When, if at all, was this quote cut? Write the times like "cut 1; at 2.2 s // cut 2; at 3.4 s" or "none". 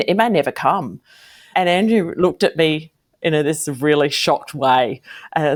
none